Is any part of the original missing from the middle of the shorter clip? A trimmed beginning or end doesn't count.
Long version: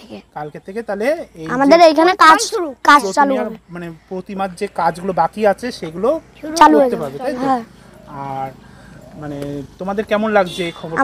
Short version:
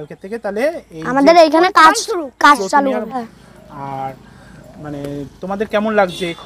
yes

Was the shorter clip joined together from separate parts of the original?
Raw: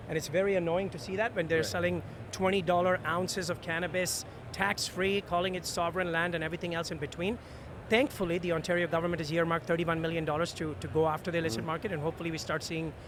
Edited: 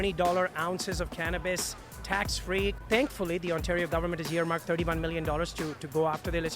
yes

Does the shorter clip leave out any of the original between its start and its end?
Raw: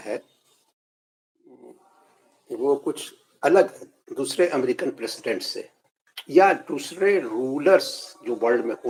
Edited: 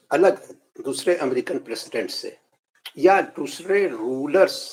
no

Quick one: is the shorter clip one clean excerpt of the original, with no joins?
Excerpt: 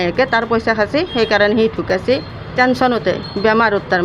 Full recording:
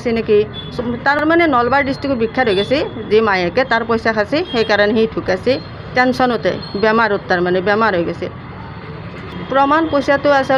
yes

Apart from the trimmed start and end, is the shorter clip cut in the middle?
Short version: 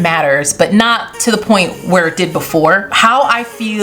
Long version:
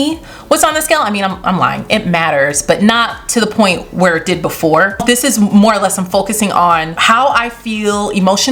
yes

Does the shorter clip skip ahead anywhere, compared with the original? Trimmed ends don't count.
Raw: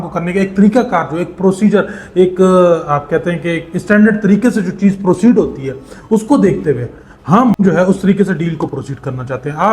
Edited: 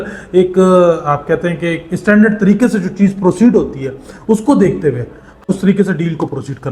yes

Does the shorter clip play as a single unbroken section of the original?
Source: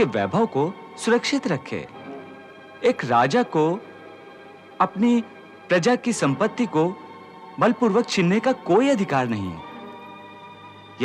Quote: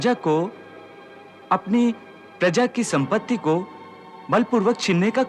yes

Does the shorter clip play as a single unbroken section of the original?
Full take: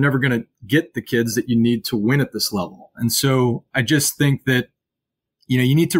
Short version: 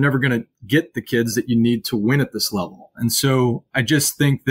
yes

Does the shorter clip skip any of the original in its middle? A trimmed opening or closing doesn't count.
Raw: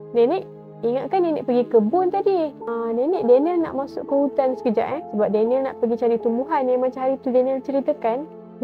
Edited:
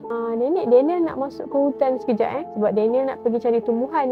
no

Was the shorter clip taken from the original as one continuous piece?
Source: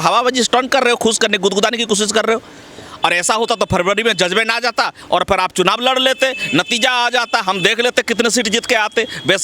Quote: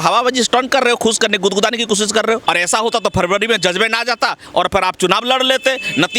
no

